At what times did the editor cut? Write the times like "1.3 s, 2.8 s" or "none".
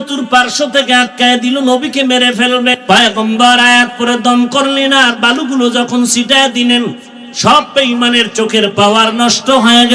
2.8 s